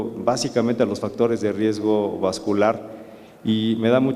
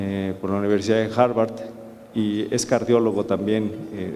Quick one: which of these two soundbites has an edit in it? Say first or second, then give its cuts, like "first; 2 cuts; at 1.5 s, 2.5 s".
first; 1 cut; at 1.9 s